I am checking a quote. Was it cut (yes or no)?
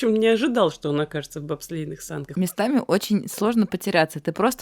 yes